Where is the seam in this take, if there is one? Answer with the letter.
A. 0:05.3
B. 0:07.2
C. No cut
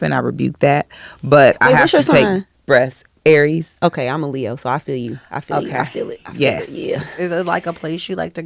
B